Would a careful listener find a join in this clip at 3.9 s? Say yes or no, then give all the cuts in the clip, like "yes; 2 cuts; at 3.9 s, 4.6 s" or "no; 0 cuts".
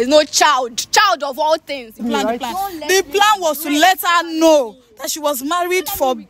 no; 1 cut; at 2.0 s